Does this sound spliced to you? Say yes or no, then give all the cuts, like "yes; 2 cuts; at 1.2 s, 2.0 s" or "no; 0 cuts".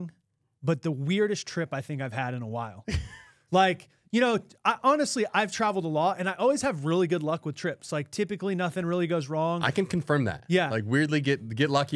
no; 0 cuts